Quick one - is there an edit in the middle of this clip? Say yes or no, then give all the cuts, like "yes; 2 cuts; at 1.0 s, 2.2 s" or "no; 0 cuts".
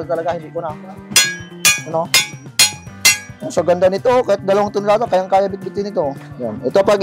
no; 0 cuts